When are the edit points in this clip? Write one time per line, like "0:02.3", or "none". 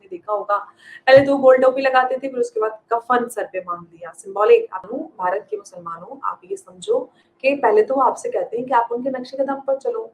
0:04.8